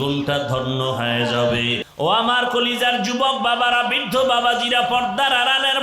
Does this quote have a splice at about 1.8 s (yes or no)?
yes